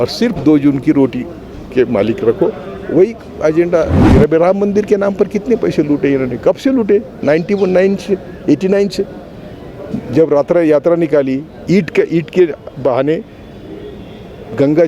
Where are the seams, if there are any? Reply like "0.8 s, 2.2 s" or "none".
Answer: 4.0 s